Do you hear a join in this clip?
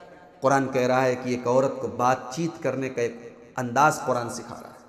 no; 0 cuts

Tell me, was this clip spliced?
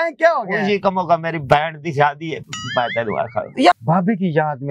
yes; 1 cut; at 3.8 s

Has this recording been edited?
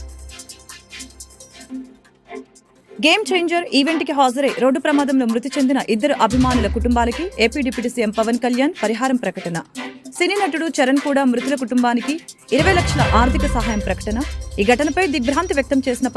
no; 0 cuts

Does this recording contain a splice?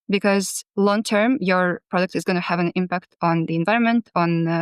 no; 0 cuts

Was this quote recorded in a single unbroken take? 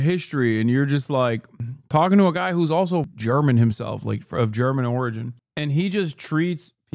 no; 1 cut; at 3.1 s

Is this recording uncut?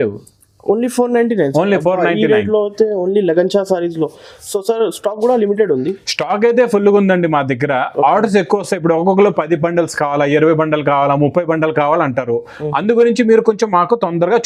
yes; 0 cuts

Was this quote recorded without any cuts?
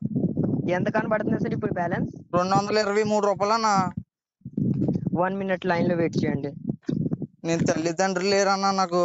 yes; 0 cuts

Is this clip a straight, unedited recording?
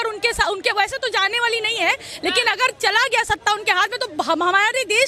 yes; 0 cuts

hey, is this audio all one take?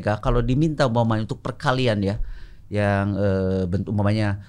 yes; 0 cuts

